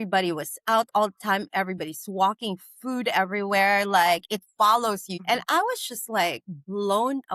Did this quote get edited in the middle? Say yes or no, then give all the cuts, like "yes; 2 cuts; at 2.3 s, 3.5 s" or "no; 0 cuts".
yes; 1 cut; at 5.1 s